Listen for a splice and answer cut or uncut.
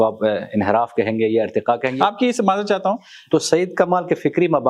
cut